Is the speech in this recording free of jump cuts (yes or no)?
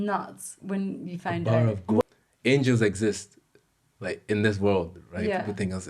no